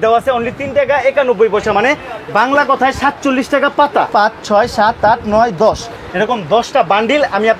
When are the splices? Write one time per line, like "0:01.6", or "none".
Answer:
0:04.1

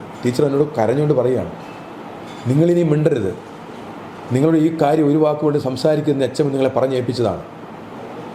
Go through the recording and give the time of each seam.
none

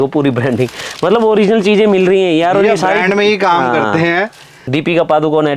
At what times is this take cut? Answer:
0:04.6

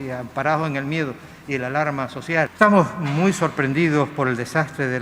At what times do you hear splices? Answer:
0:02.5

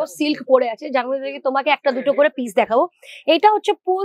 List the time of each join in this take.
none

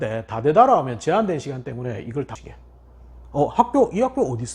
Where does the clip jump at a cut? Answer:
0:02.4

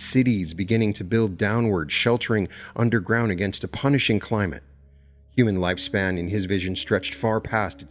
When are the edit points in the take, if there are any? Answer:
none

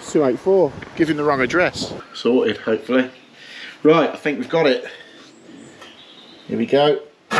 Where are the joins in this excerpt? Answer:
0:02.0

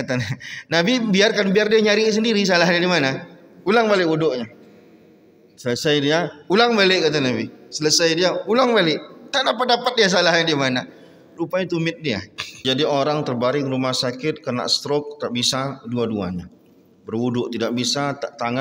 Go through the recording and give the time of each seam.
0:12.6

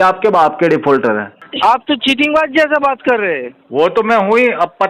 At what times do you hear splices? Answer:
0:01.4

